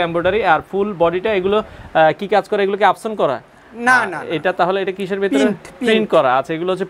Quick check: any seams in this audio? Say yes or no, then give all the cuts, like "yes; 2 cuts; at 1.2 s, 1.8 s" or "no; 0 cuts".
no; 0 cuts